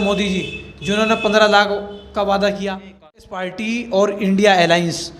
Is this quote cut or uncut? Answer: cut